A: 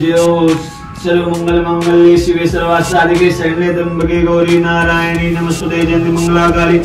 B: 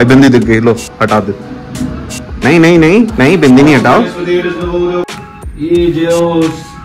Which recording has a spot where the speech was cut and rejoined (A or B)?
B